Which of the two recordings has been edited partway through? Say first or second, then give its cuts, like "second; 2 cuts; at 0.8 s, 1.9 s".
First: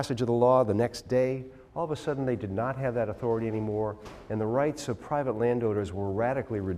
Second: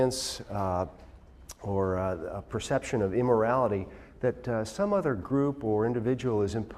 second; 1 cut; at 2.8 s